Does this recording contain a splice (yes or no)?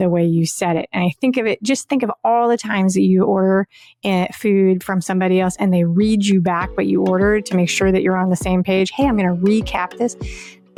no